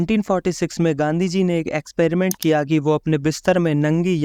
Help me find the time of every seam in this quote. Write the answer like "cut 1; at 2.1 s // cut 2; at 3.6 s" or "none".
none